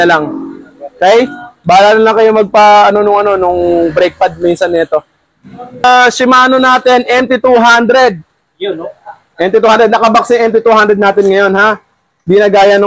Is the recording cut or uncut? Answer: cut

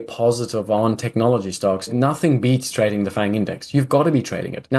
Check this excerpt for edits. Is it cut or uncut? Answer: uncut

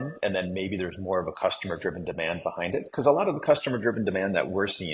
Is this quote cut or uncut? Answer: uncut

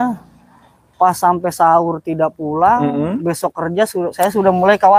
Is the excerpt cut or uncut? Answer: uncut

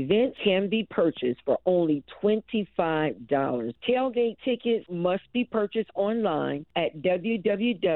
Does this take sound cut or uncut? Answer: cut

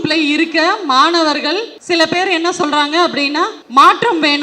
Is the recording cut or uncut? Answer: cut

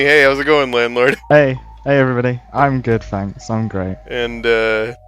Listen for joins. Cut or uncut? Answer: cut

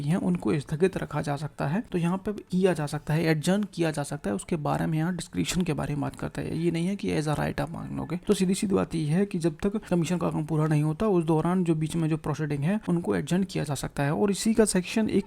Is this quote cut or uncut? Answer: cut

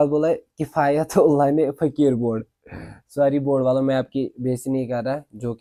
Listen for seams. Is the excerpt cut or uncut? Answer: uncut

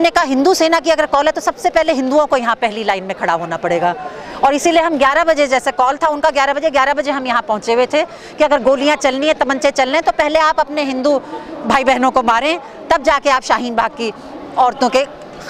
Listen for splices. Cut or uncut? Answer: uncut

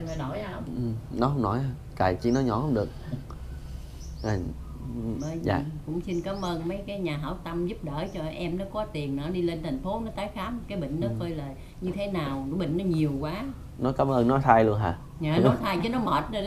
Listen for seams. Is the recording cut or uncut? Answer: uncut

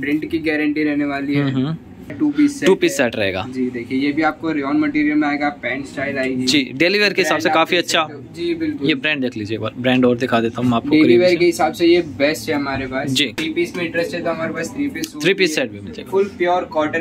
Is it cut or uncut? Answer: cut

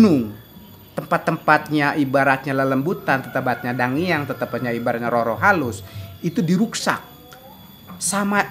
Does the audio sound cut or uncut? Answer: uncut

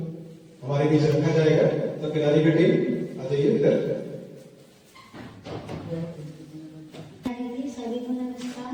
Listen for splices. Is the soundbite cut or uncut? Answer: uncut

